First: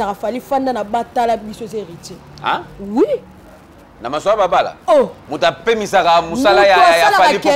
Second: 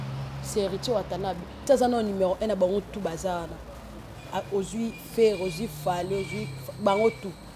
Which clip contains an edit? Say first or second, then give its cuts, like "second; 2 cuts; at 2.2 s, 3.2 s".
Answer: second; 1 cut; at 1.6 s